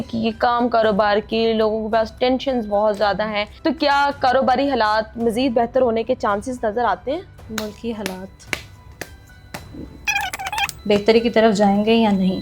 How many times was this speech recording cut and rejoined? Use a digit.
3